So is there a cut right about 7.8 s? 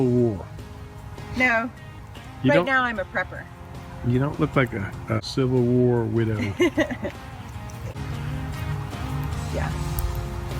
yes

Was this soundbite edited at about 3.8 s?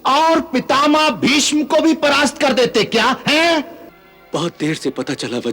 yes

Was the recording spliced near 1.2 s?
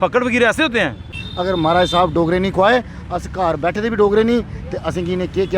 yes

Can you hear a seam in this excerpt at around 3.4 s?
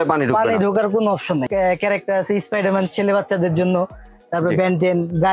no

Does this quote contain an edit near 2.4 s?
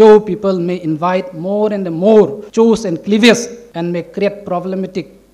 yes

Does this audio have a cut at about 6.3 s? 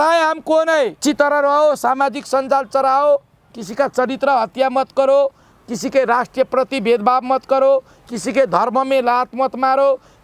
no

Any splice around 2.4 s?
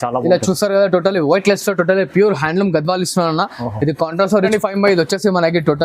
no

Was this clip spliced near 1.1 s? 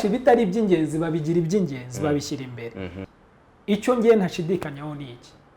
no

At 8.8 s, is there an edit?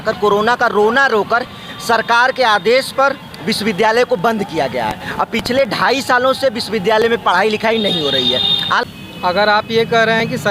yes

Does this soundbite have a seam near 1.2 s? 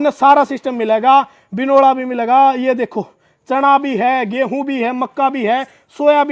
no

